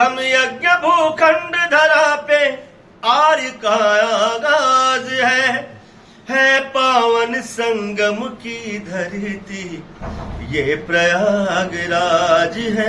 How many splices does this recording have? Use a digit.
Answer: 0